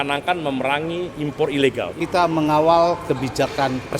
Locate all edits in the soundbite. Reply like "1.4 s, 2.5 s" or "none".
1.9 s